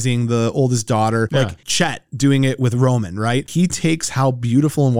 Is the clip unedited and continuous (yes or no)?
no